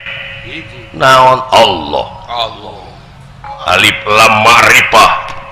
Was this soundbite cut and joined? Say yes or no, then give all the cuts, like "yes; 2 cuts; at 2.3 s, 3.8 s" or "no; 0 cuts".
yes; 1 cut; at 3.5 s